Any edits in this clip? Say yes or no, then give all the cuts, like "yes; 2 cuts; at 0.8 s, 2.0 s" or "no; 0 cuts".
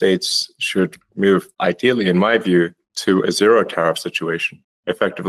no; 0 cuts